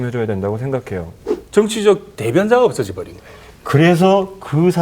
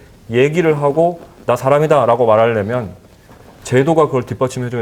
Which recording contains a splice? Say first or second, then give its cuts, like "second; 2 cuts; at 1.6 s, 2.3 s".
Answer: first; 1 cut; at 1.2 s